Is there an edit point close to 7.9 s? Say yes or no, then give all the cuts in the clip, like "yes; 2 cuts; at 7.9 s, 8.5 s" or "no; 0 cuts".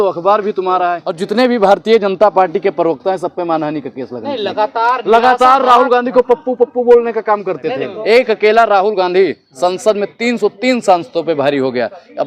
yes; 2 cuts; at 1.1 s, 7.9 s